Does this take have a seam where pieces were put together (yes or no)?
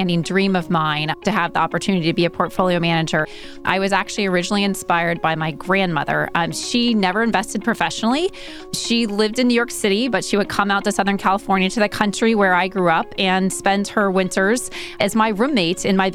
yes